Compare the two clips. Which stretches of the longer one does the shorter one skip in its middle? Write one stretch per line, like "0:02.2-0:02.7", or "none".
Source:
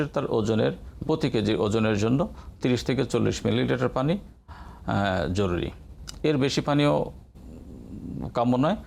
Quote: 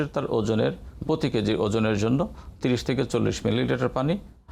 none